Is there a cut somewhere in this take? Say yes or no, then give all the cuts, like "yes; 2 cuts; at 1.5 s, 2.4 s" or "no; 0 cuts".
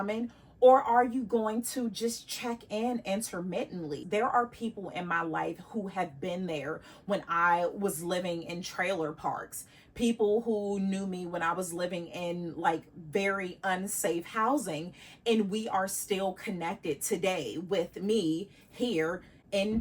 yes; 1 cut; at 4.0 s